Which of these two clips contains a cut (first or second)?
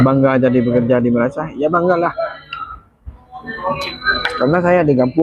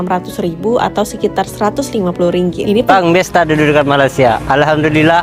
second